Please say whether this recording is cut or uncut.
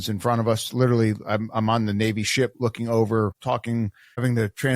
cut